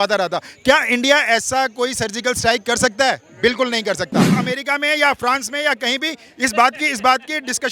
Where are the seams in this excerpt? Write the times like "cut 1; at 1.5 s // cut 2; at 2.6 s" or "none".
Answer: cut 1; at 4.3 s